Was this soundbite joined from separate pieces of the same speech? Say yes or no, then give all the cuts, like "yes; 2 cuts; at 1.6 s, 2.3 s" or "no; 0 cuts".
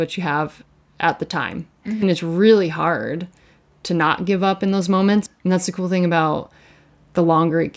yes; 2 cuts; at 2.0 s, 5.3 s